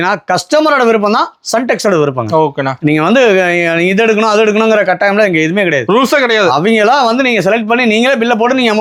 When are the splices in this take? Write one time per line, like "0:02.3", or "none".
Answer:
none